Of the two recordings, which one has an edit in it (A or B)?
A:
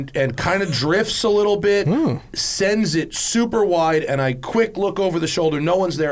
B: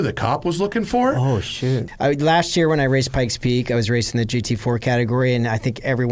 B